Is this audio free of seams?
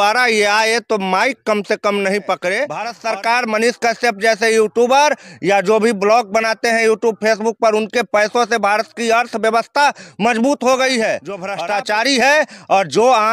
no; 2 cuts; at 2.9 s, 11.4 s

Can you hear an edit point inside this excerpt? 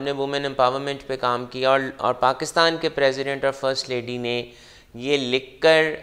no; 0 cuts

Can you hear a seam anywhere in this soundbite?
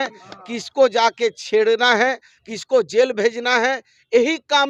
no; 0 cuts

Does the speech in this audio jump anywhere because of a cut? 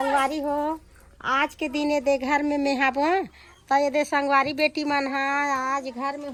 no; 0 cuts

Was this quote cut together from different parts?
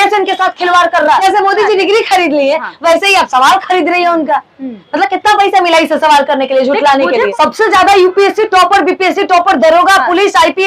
yes; 2 cuts; at 1.2 s, 7.3 s

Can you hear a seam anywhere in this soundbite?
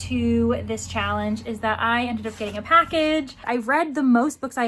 yes; 1 cut; at 3.4 s

